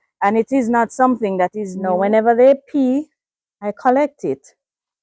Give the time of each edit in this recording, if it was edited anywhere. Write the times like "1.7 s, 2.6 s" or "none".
1.7 s